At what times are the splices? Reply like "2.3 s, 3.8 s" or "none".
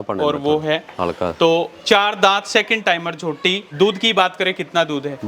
3.7 s